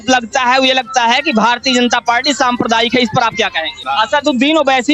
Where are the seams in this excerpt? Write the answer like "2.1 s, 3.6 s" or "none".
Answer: 3.8 s